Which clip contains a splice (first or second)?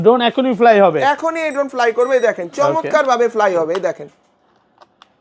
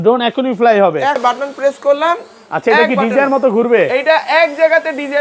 second